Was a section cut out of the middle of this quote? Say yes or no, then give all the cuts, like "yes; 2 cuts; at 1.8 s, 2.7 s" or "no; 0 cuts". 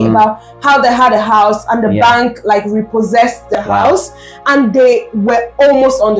no; 0 cuts